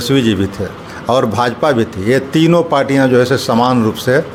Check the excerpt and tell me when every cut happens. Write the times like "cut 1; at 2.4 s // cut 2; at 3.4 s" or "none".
none